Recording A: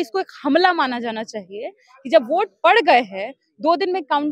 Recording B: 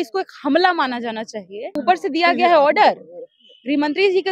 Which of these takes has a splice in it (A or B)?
B